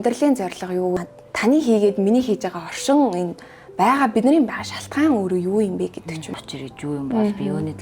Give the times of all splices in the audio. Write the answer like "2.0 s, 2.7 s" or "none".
1.0 s, 6.3 s